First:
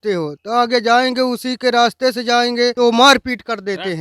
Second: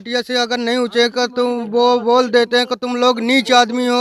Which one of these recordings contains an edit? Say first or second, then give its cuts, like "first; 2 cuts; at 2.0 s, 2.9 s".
first; 1 cut; at 2.7 s